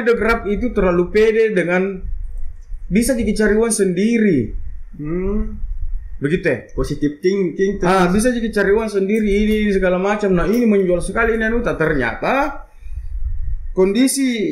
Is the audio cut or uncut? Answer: uncut